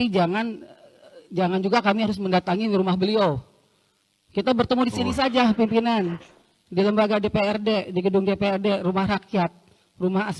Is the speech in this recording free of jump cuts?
yes; 0 cuts

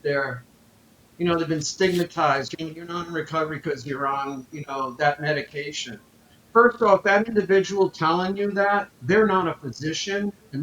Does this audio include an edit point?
yes; 1 cut; at 2.5 s

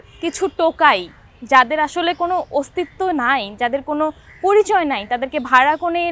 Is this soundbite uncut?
yes; 0 cuts

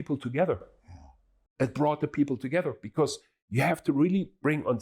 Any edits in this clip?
no; 0 cuts

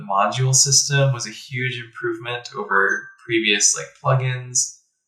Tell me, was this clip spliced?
no; 0 cuts

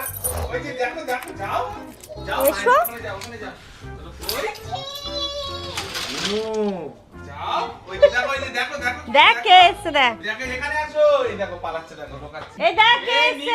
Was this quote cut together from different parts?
yes; 1 cut; at 12.5 s

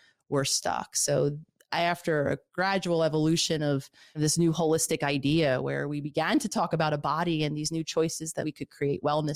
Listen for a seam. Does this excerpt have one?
yes; 2 cuts; at 4.0 s, 8.4 s

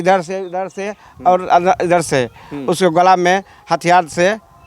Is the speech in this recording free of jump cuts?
yes; 0 cuts

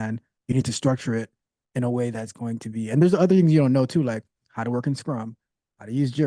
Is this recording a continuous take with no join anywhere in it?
yes; 0 cuts

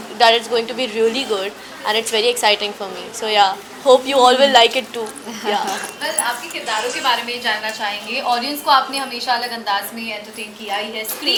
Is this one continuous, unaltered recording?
yes; 0 cuts

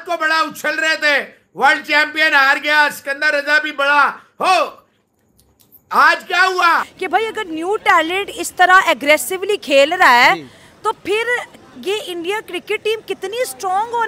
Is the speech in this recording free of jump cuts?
no; 1 cut; at 6.9 s

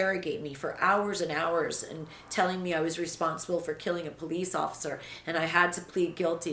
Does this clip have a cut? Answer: no; 0 cuts

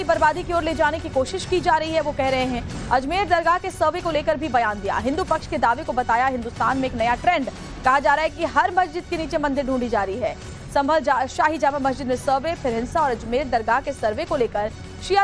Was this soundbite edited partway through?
no; 0 cuts

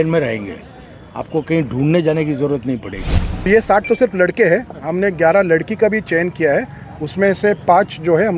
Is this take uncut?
no; 1 cut; at 3.5 s

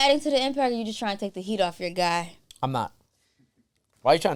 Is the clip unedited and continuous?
yes; 0 cuts

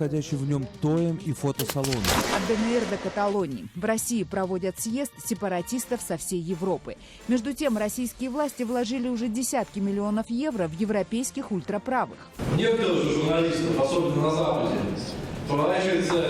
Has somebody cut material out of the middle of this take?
yes; 1 cut; at 2.3 s

